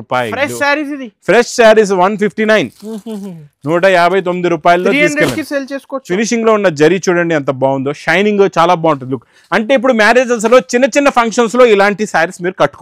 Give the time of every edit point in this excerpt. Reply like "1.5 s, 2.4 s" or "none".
6.0 s